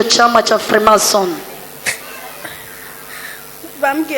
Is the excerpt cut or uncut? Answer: cut